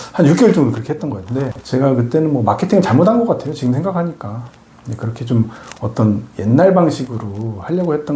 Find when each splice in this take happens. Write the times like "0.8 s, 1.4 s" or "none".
1.6 s